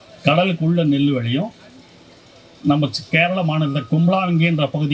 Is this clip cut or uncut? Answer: uncut